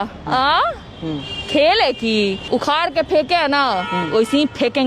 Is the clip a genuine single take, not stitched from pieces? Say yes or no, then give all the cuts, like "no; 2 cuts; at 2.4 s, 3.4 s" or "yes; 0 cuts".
no; 1 cut; at 2.4 s